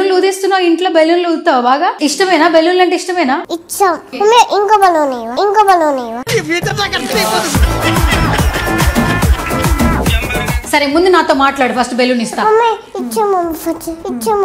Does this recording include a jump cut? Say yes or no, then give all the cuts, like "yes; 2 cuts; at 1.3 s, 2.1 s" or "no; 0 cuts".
yes; 1 cut; at 10.6 s